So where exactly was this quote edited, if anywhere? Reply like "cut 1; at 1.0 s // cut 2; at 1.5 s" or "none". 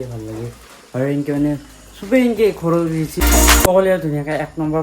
cut 1; at 3.2 s